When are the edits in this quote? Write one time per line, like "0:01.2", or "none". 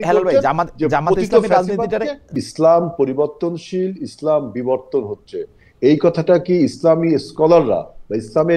0:02.3